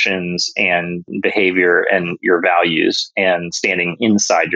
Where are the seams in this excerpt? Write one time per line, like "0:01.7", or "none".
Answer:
0:01.0